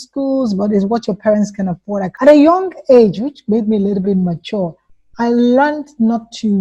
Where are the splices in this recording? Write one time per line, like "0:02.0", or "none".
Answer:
0:02.1